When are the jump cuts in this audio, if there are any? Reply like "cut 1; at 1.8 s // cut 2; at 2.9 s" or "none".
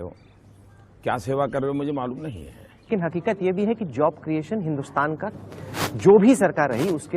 none